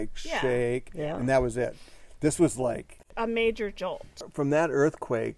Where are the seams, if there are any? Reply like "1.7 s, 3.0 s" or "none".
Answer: 4.2 s